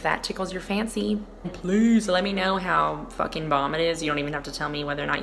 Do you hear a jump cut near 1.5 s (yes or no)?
yes